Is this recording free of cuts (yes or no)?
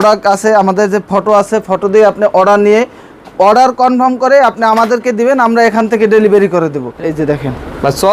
no